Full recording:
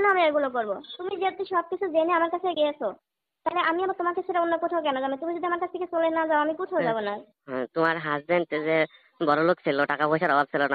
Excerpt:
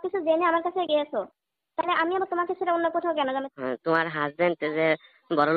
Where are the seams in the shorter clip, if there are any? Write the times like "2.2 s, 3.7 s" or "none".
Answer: 3.5 s